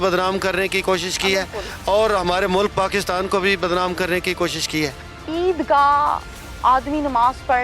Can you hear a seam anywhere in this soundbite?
yes; 1 cut; at 5.1 s

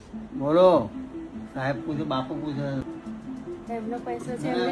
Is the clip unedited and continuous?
no; 1 cut; at 2.8 s

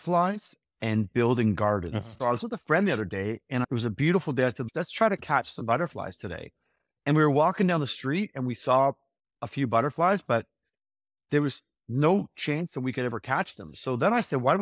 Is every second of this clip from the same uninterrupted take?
no; 3 cuts; at 2.1 s, 3.6 s, 4.6 s

